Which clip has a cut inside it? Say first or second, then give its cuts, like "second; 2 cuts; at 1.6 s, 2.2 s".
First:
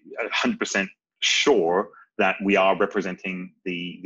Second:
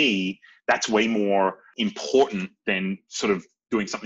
second; 1 cut; at 1.7 s